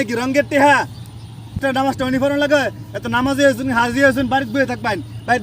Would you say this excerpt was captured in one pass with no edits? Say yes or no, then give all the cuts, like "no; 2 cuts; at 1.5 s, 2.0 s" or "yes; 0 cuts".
no; 1 cut; at 1.6 s